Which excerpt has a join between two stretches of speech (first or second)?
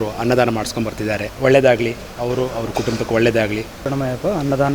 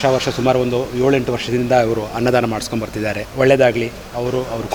first